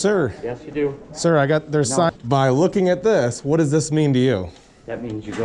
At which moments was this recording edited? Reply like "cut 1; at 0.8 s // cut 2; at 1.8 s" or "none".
cut 1; at 2.1 s